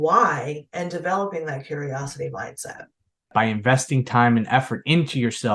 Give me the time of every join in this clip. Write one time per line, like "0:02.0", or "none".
0:03.3

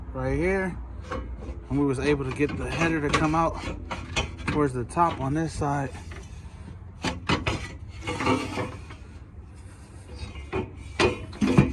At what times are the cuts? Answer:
none

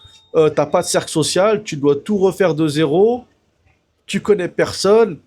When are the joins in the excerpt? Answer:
none

